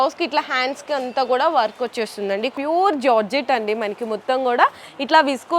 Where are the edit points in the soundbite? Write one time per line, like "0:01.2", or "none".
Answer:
0:02.5

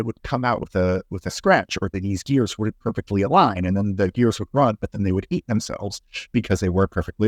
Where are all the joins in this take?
none

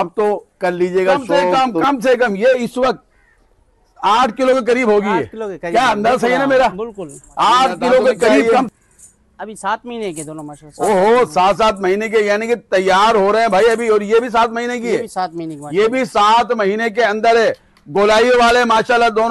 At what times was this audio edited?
0:01.5
0:08.5

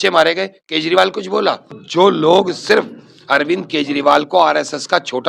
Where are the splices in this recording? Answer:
0:01.8

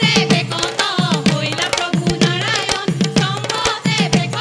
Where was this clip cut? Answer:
none

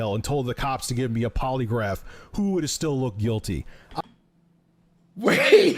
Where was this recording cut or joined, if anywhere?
0:02.0

